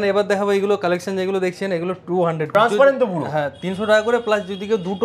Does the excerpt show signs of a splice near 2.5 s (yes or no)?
yes